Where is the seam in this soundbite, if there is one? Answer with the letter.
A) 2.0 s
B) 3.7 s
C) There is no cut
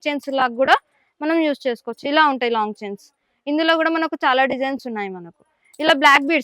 C